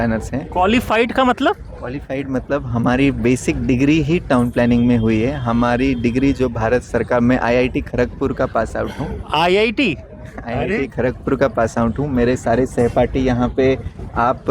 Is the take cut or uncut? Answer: uncut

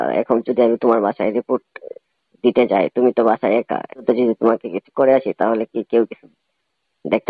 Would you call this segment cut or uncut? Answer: cut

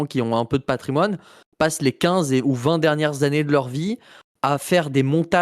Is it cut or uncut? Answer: uncut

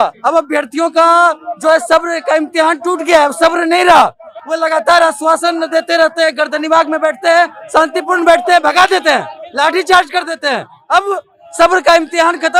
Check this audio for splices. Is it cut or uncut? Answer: uncut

